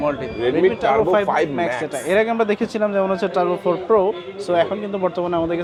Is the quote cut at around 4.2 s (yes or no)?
no